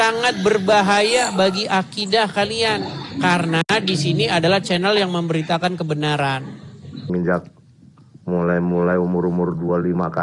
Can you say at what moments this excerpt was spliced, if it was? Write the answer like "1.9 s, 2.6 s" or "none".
7.1 s